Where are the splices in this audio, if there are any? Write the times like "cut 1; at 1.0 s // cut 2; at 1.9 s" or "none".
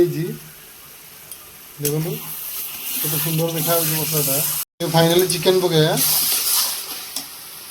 cut 1; at 4.6 s